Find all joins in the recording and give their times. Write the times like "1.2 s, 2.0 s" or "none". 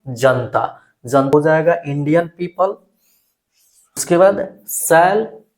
1.3 s, 4.0 s